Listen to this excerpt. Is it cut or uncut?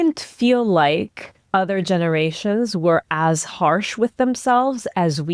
uncut